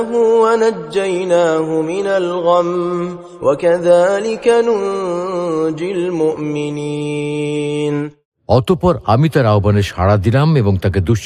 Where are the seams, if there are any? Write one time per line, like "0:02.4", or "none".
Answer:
0:08.2